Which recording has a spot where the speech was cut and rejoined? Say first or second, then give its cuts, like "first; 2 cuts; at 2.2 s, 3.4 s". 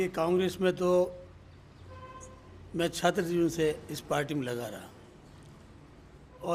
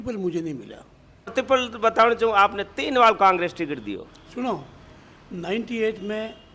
second; 1 cut; at 1.3 s